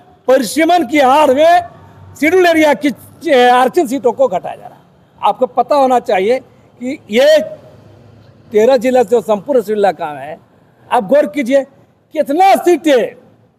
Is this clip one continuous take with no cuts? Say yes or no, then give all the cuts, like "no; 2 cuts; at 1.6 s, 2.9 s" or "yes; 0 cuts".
yes; 0 cuts